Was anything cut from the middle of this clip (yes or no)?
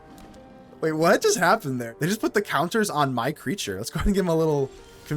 yes